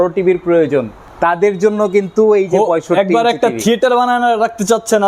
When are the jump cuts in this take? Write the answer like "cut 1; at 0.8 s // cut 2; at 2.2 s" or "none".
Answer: cut 1; at 1.0 s